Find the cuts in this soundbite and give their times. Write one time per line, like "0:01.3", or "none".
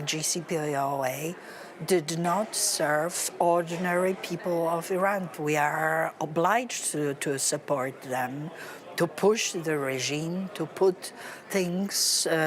0:05.3